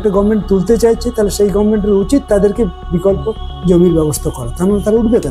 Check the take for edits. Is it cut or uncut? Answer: uncut